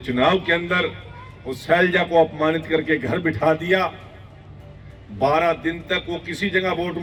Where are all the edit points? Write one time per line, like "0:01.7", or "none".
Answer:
none